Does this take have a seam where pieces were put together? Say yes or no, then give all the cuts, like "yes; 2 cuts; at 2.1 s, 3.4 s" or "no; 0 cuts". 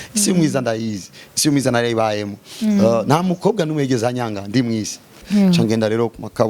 yes; 1 cut; at 5.2 s